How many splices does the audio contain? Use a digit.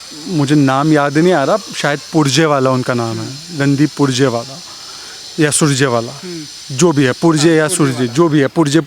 0